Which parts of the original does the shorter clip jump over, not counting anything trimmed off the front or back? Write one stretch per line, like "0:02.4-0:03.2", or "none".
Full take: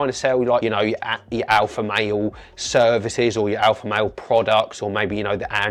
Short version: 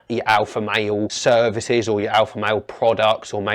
0:02.4-0:02.6